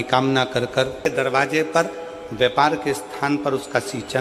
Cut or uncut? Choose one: cut